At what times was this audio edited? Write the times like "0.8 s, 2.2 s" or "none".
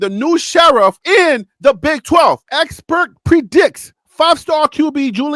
2.4 s

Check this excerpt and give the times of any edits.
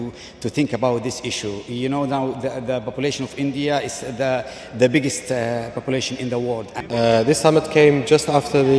6.7 s

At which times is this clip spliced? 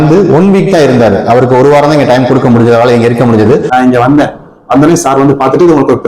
3.7 s

